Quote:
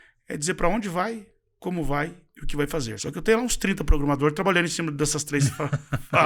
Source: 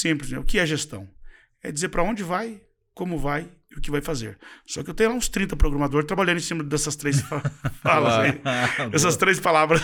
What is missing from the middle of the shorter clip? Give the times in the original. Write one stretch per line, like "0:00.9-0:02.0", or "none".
0:04.3-0:04.7

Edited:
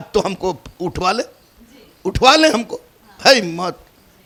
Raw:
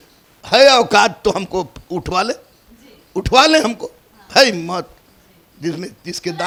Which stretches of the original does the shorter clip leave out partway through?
none

